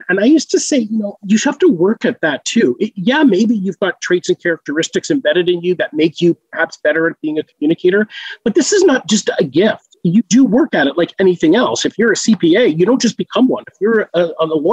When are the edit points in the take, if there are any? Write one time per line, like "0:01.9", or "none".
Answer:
0:01.1